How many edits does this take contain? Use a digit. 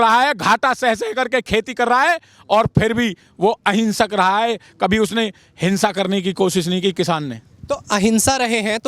0